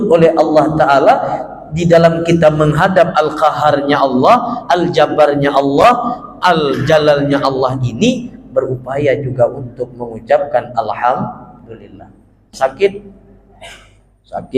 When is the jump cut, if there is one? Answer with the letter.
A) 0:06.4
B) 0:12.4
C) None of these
B